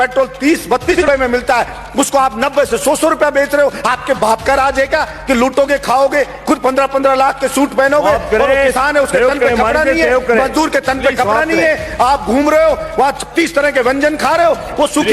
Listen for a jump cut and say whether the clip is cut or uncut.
cut